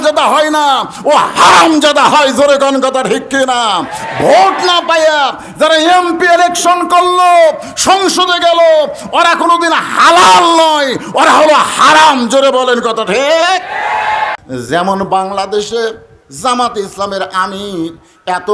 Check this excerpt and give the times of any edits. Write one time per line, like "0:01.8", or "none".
0:14.4